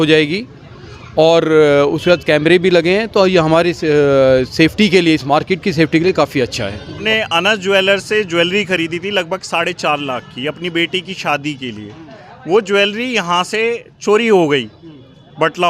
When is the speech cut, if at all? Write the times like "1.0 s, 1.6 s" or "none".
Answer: 7.0 s